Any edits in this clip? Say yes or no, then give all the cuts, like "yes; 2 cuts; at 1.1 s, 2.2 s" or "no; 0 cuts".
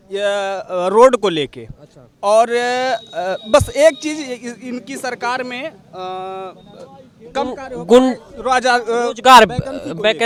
no; 0 cuts